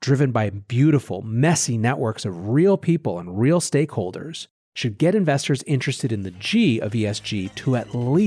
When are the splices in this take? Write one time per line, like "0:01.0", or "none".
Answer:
none